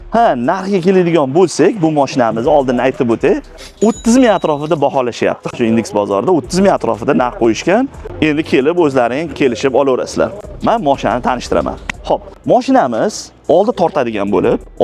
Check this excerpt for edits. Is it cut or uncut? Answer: uncut